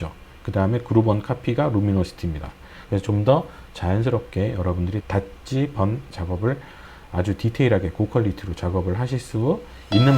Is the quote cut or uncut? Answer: cut